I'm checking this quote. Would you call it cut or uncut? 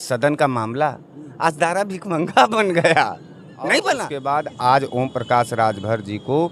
cut